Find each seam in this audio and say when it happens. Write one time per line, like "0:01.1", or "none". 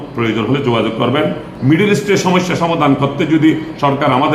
0:01.5